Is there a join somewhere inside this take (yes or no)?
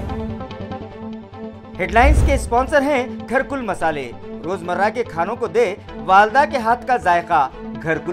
no